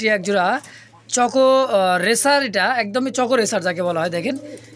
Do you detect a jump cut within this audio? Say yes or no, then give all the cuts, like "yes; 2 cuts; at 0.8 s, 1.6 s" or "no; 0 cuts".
no; 0 cuts